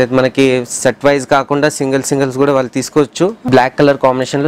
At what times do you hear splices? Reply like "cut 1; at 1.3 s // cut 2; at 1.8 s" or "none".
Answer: cut 1; at 3.4 s